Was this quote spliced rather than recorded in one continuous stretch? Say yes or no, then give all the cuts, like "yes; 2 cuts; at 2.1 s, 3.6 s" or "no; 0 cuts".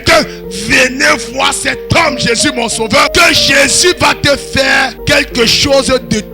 yes; 2 cuts; at 3.1 s, 5.0 s